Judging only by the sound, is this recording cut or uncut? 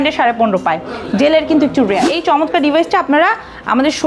cut